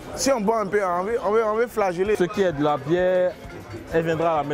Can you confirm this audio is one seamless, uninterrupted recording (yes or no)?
no